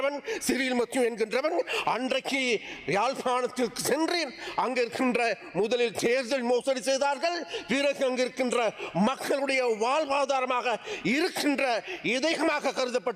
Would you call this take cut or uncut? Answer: uncut